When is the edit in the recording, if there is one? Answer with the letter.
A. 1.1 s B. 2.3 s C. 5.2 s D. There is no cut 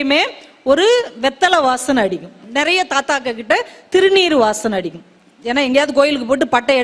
B